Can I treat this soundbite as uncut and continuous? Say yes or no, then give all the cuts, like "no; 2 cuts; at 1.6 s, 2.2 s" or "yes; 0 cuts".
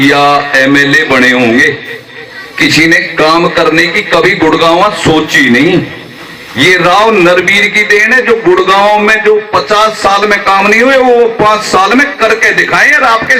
yes; 0 cuts